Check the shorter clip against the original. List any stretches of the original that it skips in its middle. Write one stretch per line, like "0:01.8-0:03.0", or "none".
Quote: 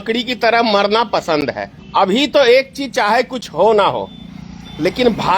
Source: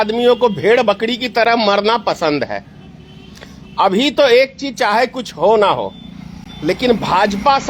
0:02.7-0:03.6